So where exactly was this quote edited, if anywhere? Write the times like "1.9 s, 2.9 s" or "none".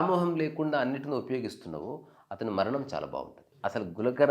3.4 s

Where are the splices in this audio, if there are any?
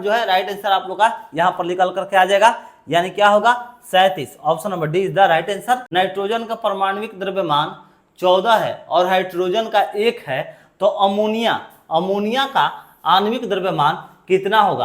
5.8 s

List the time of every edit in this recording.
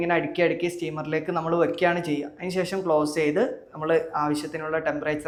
none

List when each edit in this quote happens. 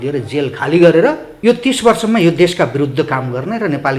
1.3 s

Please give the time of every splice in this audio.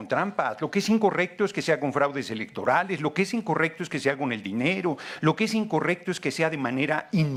none

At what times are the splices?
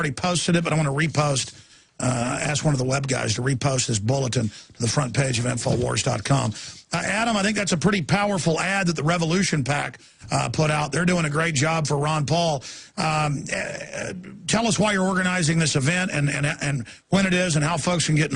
16.9 s

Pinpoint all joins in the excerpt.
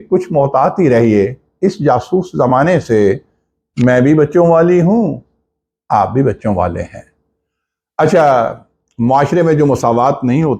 none

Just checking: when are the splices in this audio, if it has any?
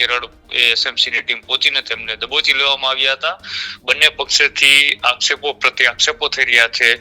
3.7 s

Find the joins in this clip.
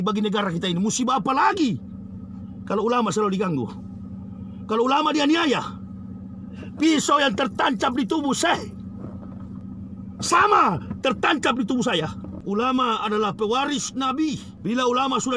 12.3 s, 14.5 s

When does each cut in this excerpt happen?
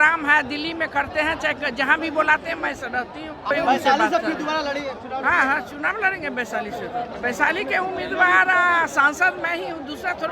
3.5 s, 7.1 s

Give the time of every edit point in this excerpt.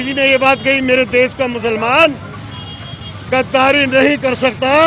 none

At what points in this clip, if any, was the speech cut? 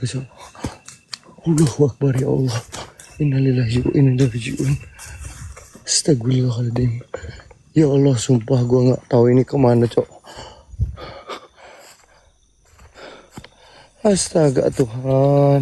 11.5 s

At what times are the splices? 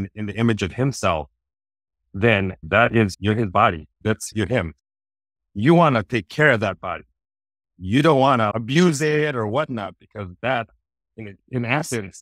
none

